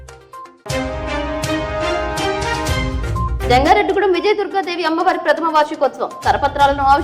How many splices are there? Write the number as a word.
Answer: one